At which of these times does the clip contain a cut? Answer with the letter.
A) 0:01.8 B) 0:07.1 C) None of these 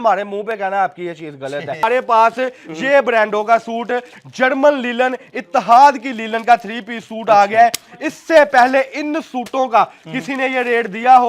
A